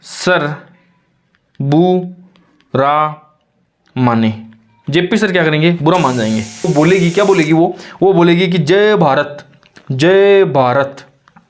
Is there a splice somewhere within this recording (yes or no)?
yes